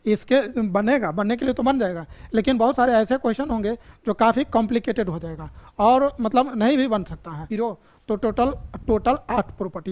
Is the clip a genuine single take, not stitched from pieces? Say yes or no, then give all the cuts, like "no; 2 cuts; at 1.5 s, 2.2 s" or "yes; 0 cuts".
no; 1 cut; at 7.5 s